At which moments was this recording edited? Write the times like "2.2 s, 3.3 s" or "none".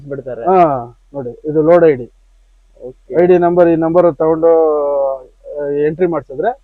none